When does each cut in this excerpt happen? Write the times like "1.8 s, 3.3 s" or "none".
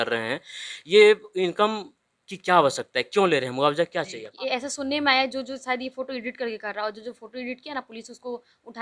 4.2 s

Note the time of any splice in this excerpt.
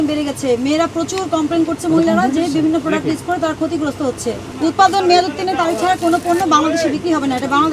4.5 s

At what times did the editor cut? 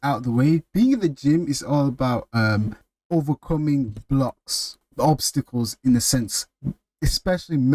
2.9 s, 4.8 s

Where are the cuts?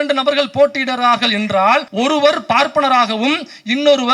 1.9 s

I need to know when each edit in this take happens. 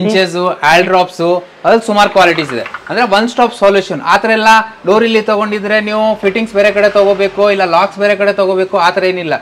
none

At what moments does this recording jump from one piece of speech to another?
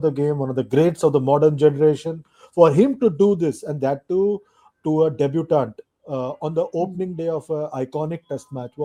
none

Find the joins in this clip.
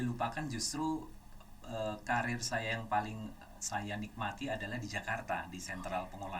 none

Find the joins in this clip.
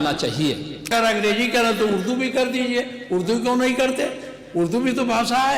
0.9 s

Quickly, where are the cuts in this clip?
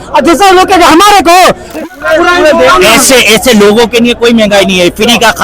1.8 s

